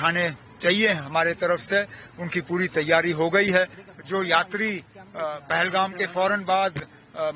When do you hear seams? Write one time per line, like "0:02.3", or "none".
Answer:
0:03.8